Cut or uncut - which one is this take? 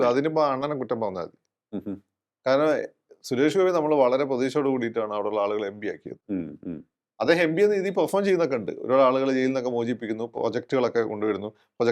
uncut